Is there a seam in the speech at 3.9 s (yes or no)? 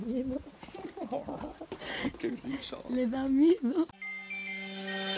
yes